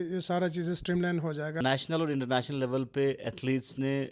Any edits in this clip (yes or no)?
yes